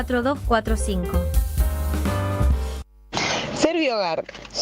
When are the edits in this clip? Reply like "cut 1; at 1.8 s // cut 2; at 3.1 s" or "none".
cut 1; at 2.9 s